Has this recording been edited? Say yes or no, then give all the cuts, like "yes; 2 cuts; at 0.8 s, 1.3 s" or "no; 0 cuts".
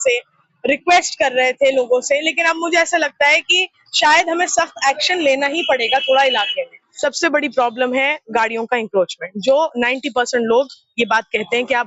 yes; 1 cut; at 6.8 s